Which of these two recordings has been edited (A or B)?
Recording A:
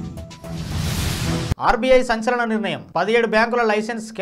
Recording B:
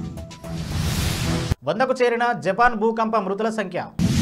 A